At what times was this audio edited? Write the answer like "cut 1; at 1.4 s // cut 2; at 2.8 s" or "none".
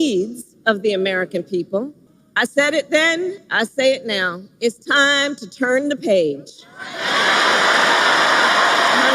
cut 1; at 2.0 s